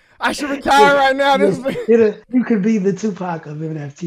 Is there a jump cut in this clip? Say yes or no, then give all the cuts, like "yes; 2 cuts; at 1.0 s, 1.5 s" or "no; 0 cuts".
yes; 1 cut; at 2.2 s